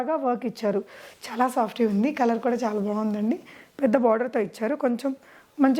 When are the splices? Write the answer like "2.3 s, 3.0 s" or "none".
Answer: none